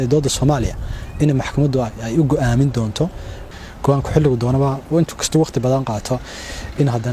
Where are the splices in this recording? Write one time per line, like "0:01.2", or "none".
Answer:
0:03.4